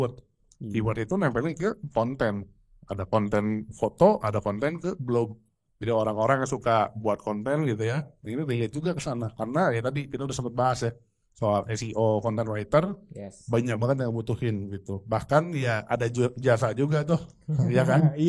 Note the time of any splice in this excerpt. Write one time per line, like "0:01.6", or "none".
none